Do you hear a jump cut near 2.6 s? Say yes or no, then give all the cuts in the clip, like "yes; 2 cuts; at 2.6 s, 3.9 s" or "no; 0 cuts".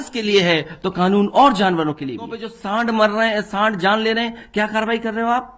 yes; 1 cut; at 2.6 s